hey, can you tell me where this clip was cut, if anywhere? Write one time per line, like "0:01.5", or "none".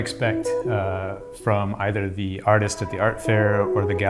none